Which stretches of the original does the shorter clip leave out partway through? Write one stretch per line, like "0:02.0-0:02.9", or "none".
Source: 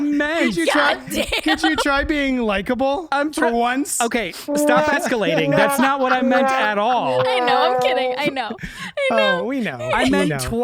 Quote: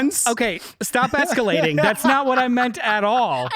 none